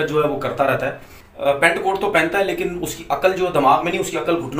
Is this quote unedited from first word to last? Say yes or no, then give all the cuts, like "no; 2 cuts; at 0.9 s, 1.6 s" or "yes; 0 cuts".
yes; 0 cuts